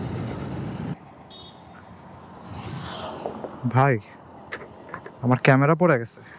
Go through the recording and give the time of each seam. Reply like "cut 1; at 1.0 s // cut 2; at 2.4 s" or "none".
cut 1; at 0.9 s